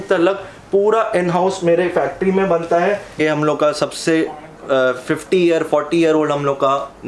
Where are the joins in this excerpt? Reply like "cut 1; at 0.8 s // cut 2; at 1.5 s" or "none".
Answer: cut 1; at 3.2 s